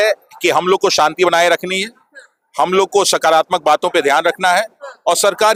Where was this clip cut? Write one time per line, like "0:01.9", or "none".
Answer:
none